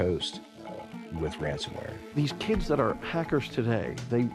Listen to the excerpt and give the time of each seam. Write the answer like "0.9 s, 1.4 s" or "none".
2.2 s

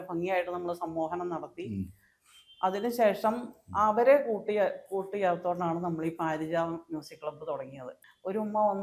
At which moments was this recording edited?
7.9 s

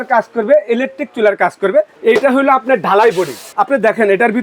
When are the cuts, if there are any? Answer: 1.9 s, 3.5 s

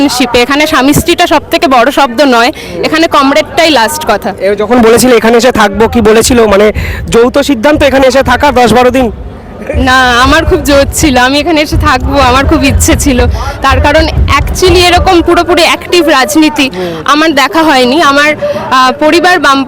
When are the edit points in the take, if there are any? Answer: none

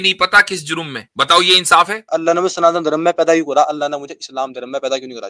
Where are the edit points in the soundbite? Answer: 1.0 s, 2.1 s

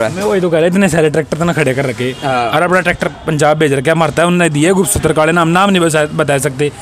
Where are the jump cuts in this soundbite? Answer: none

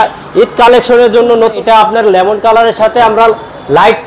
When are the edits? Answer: 1.5 s

